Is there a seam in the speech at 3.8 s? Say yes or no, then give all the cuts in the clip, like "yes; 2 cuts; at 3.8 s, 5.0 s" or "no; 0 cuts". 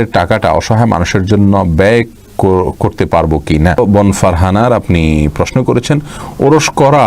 yes; 1 cut; at 3.8 s